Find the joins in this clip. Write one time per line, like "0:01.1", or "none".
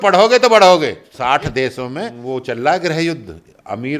0:01.1
0:02.2